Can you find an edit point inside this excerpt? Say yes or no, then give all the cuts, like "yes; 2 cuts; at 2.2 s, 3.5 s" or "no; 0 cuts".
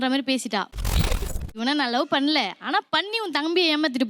yes; 1 cut; at 0.9 s